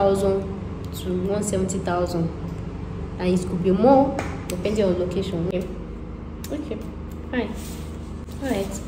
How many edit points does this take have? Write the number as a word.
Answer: one